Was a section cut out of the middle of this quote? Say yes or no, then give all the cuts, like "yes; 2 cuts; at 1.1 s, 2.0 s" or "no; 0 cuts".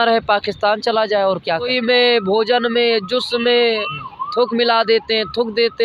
yes; 1 cut; at 1.7 s